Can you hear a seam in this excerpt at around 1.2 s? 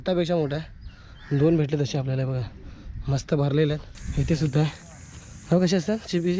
no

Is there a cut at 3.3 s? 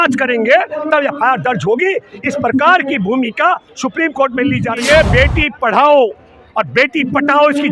no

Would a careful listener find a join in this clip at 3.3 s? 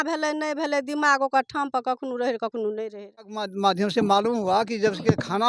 yes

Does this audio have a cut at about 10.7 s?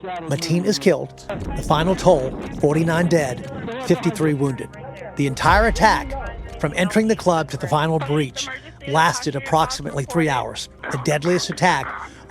yes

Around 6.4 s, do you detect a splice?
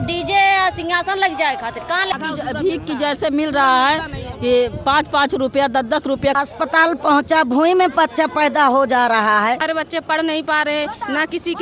yes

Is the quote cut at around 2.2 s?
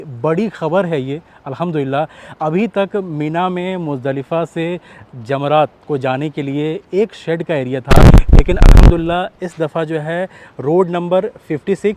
no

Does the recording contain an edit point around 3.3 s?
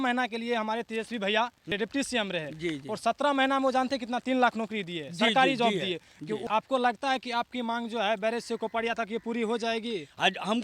no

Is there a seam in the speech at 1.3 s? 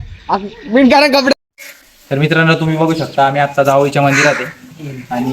yes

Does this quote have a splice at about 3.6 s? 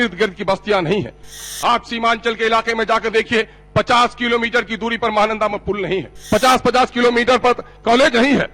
no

